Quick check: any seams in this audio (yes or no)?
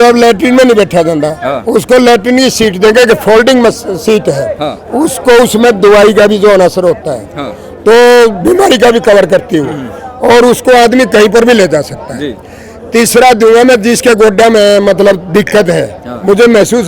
no